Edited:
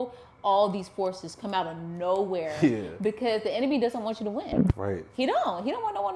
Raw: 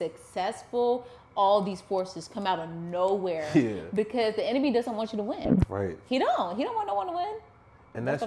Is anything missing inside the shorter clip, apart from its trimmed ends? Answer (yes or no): no